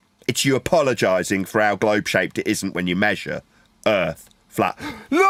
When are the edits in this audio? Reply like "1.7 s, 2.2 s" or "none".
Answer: none